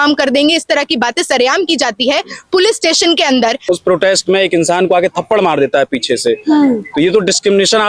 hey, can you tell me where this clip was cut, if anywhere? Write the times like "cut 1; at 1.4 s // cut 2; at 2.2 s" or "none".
cut 1; at 3.6 s